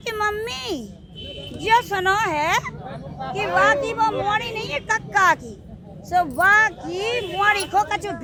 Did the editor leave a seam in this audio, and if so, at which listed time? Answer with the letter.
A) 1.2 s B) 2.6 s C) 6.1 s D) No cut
D